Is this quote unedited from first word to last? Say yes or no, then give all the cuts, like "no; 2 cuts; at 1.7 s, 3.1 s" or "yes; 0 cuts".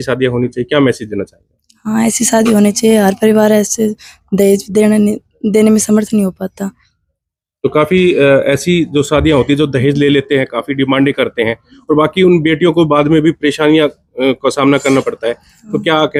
yes; 0 cuts